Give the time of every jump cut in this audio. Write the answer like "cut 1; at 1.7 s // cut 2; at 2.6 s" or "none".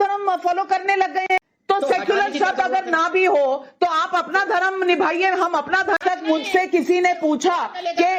cut 1; at 1.4 s // cut 2; at 6.0 s